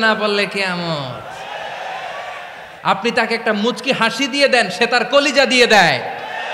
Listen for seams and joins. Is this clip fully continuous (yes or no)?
no